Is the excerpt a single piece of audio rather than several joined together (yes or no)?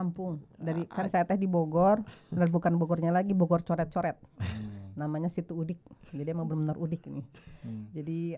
yes